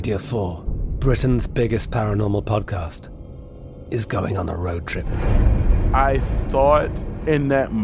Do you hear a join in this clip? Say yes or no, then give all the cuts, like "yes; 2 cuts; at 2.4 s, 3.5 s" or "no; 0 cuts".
no; 0 cuts